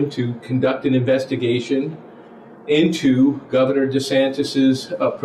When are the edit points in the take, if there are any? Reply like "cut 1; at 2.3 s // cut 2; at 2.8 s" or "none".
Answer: none